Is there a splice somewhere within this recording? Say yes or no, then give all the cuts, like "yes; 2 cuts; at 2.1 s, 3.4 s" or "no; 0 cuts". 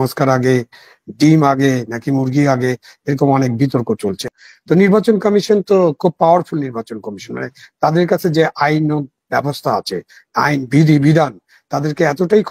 yes; 1 cut; at 4.2 s